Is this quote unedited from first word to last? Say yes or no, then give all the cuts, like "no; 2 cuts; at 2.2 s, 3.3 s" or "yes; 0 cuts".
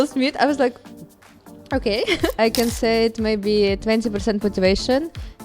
no; 1 cut; at 2.4 s